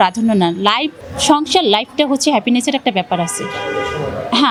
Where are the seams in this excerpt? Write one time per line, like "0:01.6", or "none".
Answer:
none